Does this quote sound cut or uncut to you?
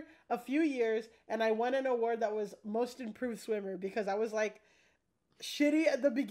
uncut